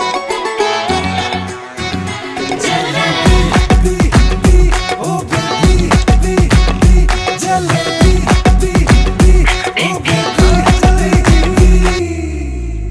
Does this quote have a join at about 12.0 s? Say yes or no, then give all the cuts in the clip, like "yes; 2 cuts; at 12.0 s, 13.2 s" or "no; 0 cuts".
yes; 1 cut; at 12.0 s